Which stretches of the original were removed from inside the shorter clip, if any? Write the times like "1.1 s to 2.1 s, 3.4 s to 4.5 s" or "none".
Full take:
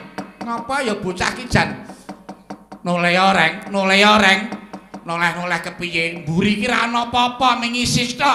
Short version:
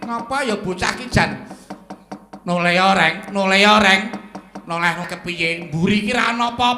5.4 s to 5.6 s